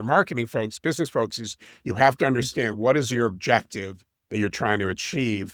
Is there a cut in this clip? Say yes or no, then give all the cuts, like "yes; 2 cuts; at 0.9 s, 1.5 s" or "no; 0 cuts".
no; 0 cuts